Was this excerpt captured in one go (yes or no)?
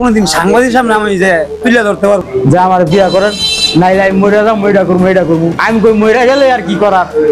no